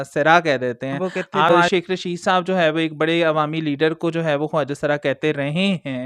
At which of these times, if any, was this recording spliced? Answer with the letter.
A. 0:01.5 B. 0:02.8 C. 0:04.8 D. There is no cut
A